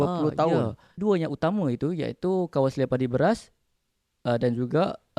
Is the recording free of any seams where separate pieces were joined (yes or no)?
no